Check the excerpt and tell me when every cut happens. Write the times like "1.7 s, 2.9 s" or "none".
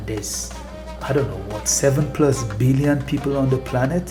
none